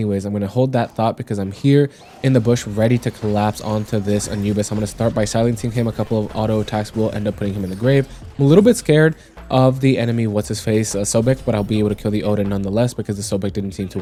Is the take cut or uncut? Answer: uncut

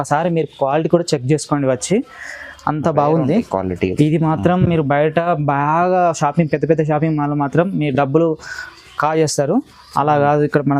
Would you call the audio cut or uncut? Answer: uncut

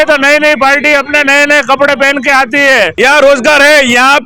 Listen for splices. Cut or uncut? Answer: cut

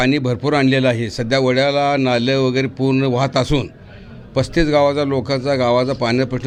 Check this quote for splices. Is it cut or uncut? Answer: uncut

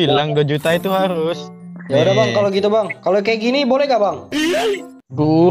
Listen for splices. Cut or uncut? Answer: cut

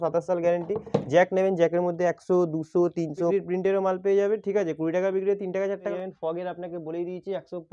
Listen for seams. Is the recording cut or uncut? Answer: cut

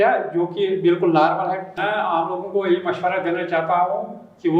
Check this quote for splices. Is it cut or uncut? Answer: cut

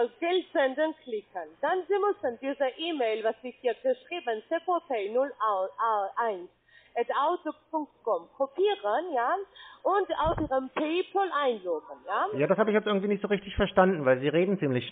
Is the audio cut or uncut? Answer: uncut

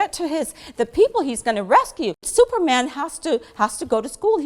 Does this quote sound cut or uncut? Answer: cut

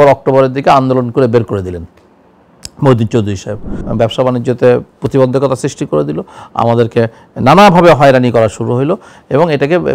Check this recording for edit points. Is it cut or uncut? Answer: cut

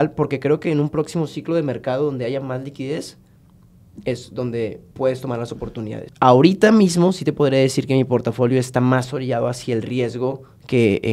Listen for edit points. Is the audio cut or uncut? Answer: cut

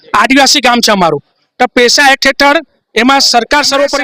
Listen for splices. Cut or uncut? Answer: uncut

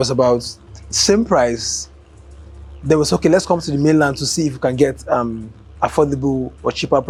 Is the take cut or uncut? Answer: uncut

